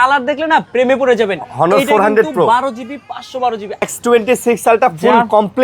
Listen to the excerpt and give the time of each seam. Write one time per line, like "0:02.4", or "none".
0:03.9